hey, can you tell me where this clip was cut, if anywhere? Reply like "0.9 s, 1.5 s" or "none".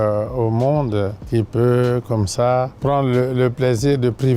1.2 s, 2.7 s

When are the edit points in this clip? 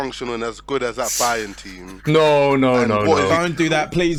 none

